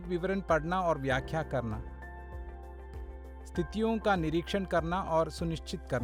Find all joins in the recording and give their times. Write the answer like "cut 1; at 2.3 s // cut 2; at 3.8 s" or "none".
none